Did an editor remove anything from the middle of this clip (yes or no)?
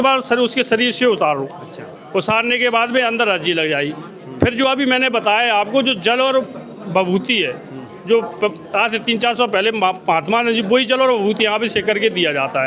no